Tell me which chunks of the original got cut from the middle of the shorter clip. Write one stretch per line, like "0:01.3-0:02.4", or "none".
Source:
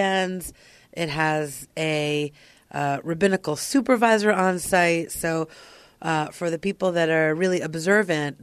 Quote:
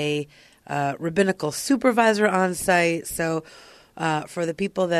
none